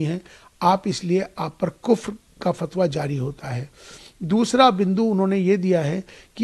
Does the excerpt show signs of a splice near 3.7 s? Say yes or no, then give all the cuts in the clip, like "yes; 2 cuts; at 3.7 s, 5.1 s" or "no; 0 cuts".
no; 0 cuts